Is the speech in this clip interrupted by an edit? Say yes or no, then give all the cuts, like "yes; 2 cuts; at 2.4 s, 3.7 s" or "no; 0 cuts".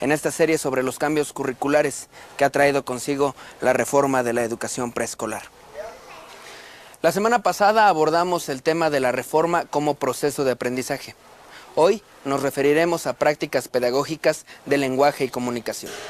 yes; 1 cut; at 7.5 s